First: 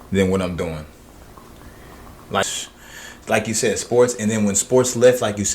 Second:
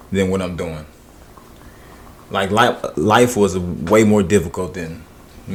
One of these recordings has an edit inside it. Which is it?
first; 1 cut; at 2.5 s

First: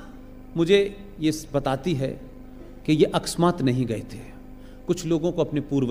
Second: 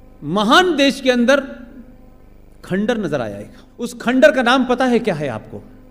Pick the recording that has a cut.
second; 1 cut; at 3.9 s

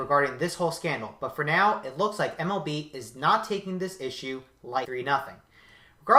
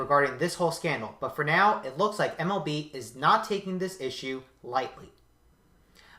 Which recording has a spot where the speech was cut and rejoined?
second; 1 cut; at 4.9 s

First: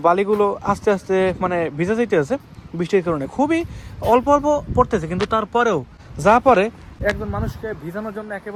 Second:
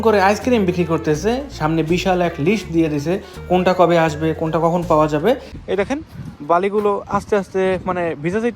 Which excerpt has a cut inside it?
second; 1 cut; at 5.5 s

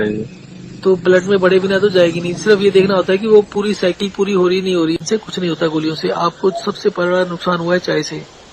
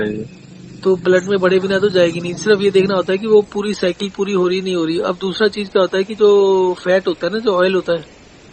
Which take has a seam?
first; 1 cut; at 5.0 s

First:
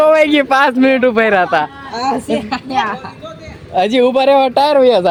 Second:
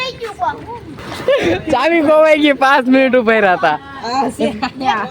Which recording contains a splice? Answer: second; 1 cut; at 1.0 s

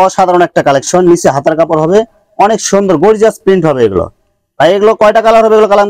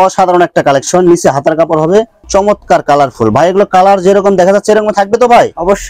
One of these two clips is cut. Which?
second; 1 cut; at 2.3 s

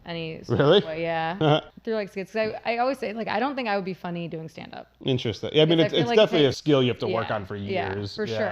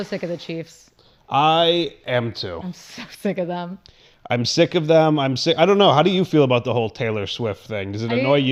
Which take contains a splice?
first; 2 cuts; at 1.7 s, 6.6 s

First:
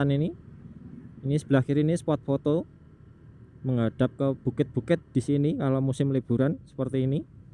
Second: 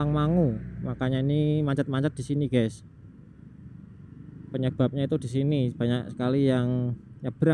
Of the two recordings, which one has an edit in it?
first; 1 cut; at 5.1 s

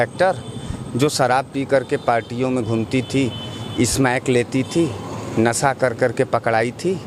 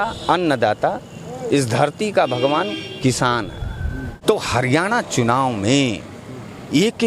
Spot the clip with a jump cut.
second; 1 cut; at 4.2 s

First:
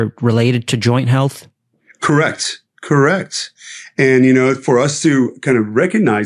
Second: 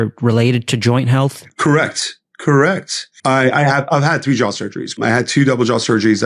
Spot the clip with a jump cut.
second; 3 cuts; at 1.5 s, 3.3 s, 5.0 s

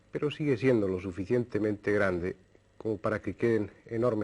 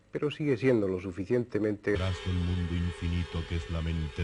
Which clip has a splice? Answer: first; 1 cut; at 2.0 s

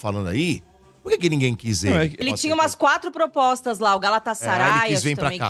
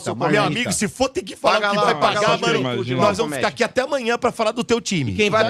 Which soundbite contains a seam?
first; 1 cut; at 2.2 s

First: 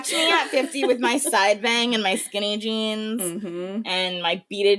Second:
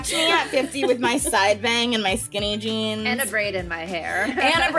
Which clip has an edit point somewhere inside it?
second; 1 cut; at 3.2 s

